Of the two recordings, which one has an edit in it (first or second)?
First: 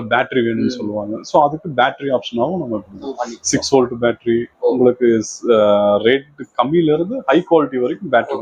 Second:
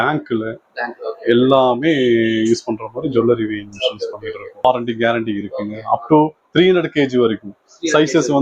second